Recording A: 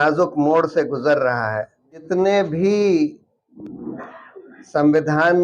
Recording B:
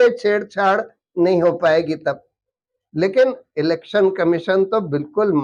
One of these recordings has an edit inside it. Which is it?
A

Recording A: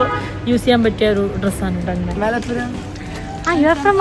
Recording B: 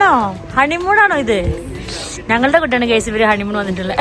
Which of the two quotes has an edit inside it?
A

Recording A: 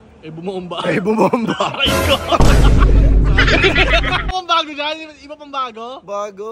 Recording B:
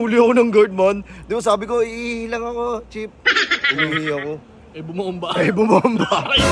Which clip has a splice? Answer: A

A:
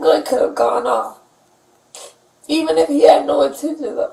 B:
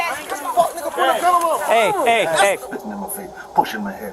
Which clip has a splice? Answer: B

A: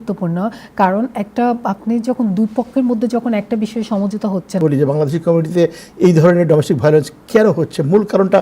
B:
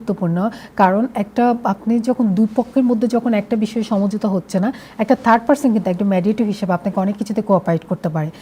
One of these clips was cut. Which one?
A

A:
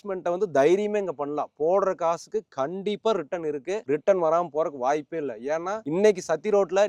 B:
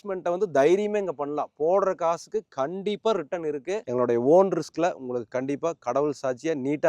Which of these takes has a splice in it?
B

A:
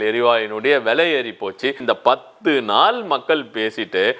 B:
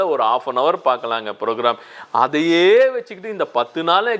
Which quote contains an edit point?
A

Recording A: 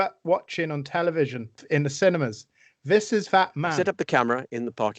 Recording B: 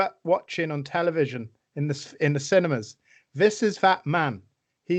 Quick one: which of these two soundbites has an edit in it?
A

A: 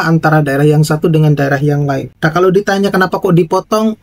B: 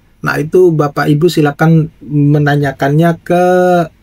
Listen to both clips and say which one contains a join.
A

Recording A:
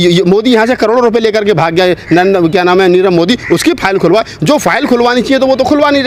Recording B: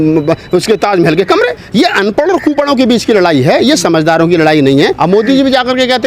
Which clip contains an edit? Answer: B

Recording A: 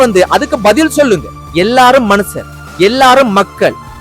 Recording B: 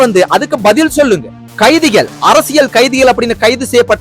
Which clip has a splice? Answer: A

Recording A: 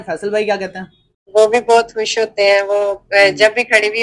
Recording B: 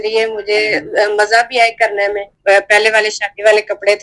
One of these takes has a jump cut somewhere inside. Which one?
B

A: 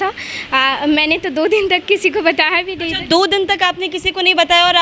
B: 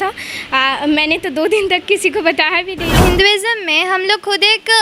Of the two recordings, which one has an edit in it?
B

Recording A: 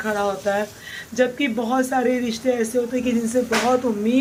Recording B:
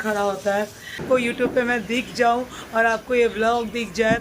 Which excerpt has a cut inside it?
B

